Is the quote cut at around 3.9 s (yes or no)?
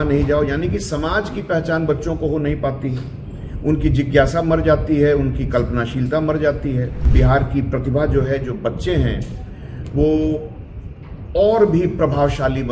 no